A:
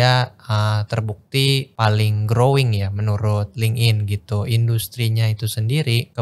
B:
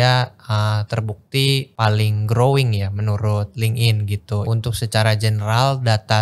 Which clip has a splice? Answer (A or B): B